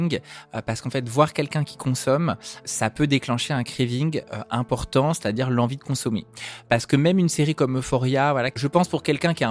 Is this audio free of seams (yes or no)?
no